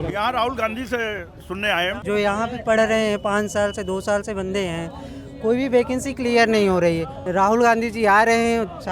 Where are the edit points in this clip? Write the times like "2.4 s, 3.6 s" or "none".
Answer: 2.0 s, 7.2 s